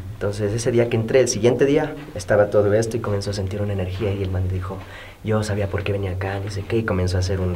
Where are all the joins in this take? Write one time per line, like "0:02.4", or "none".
none